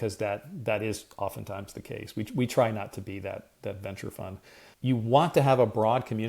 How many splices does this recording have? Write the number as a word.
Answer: one